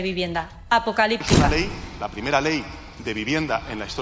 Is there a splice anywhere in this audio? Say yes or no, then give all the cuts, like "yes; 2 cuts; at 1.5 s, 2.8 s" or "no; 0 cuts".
yes; 1 cut; at 1.5 s